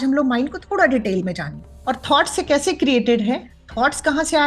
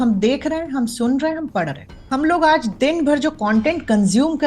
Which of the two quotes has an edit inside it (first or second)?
first